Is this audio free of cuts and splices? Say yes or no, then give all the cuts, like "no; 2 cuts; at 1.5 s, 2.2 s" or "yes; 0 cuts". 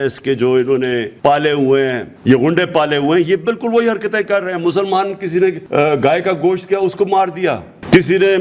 no; 3 cuts; at 1.1 s, 2.1 s, 5.6 s